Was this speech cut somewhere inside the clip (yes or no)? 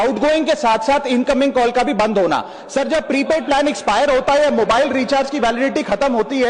no